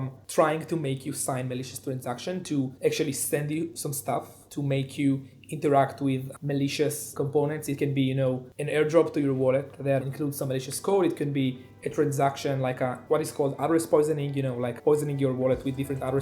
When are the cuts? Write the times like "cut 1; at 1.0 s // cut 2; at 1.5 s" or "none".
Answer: cut 1; at 2.7 s // cut 2; at 4.4 s // cut 3; at 7.1 s // cut 4; at 10.0 s